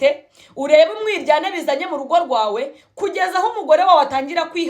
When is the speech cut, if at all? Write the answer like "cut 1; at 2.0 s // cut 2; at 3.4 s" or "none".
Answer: none